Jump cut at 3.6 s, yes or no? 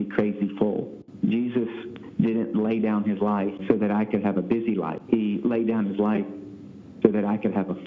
yes